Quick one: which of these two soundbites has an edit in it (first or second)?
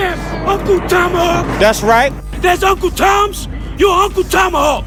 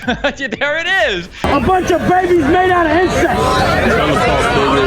second